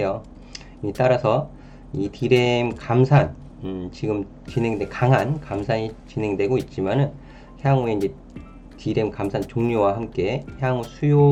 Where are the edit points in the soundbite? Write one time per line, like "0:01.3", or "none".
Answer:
none